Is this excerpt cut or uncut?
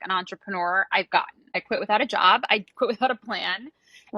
cut